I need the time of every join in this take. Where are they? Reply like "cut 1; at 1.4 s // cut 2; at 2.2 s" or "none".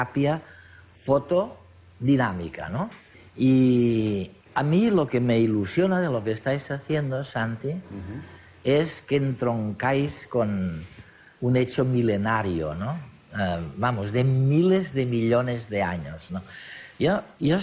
cut 1; at 15.9 s